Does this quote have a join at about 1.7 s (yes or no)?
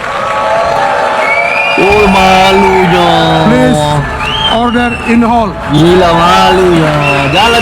yes